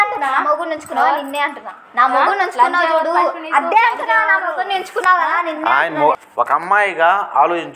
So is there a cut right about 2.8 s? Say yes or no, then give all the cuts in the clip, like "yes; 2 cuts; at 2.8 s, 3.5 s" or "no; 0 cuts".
no; 1 cut; at 6.1 s